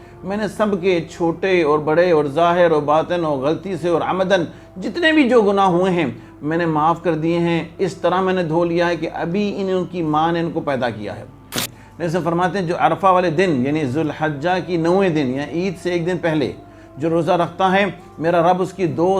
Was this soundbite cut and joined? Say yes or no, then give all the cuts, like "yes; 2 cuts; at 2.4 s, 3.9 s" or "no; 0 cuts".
yes; 1 cut; at 11.7 s